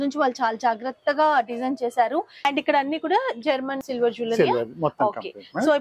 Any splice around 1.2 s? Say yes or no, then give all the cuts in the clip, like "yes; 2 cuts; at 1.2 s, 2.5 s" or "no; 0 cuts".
no; 2 cuts; at 2.4 s, 3.8 s